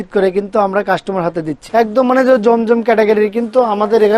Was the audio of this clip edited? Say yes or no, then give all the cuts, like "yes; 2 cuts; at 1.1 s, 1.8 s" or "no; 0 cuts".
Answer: yes; 1 cut; at 1.6 s